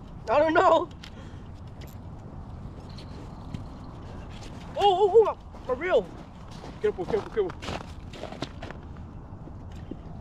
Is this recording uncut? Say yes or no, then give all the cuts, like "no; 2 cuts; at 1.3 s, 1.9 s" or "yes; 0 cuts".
yes; 0 cuts